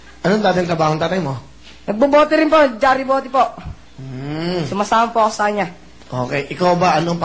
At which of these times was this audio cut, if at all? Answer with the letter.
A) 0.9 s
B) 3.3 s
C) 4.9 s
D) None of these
B